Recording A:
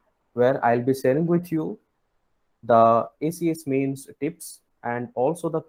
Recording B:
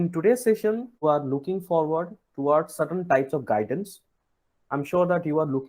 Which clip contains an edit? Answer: B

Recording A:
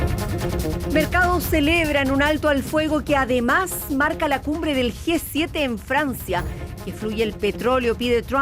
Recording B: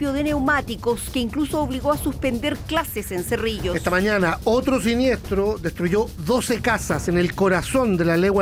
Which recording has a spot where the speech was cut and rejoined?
A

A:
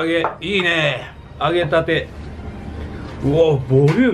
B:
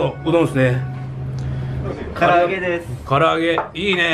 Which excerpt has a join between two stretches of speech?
B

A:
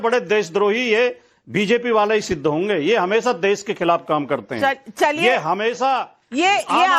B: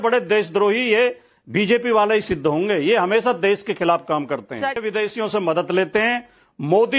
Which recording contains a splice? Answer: B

